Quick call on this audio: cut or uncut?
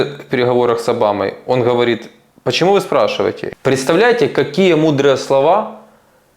cut